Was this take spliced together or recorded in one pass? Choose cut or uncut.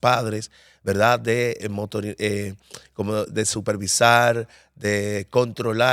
uncut